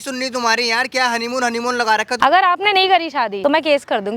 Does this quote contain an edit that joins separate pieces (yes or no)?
yes